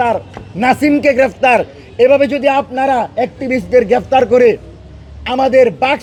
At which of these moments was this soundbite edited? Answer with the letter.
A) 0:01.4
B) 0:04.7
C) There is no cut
C